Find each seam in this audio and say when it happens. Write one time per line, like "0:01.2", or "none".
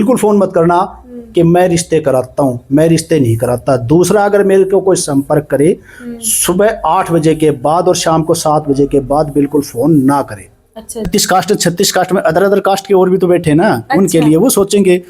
0:11.1